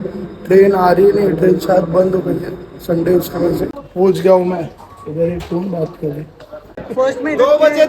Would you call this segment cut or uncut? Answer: cut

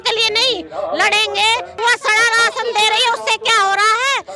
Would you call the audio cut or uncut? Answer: cut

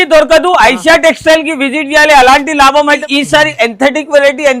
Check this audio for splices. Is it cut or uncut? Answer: cut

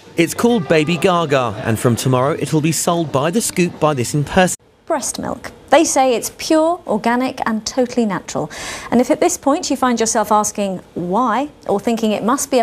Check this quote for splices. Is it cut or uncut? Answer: uncut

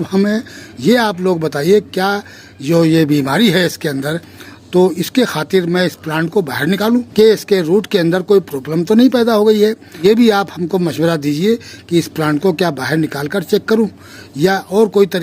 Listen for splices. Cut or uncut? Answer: cut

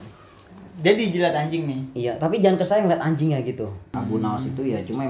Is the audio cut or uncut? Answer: cut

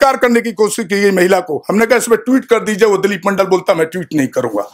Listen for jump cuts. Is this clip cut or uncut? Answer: uncut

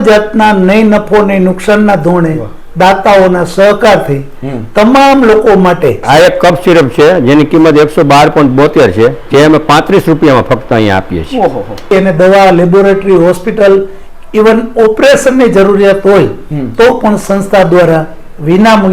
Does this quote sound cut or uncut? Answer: cut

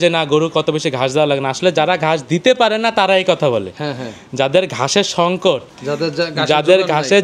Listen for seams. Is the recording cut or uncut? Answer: uncut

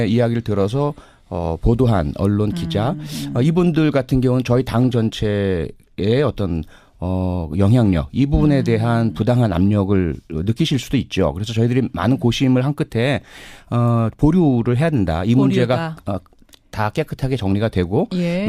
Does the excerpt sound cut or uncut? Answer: cut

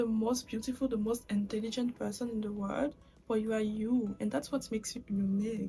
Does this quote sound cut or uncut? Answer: uncut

